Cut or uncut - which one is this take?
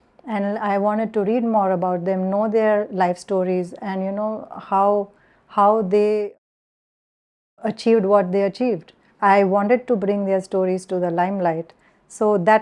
cut